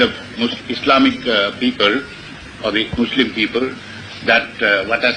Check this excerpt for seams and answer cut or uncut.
uncut